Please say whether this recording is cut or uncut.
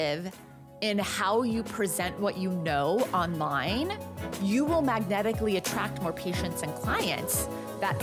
uncut